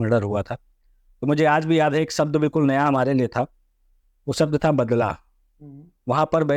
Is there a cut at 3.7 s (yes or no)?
no